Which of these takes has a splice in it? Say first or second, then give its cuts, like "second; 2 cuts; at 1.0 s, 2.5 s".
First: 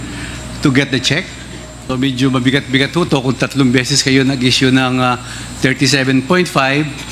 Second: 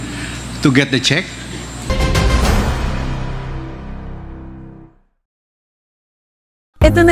first; 1 cut; at 1.8 s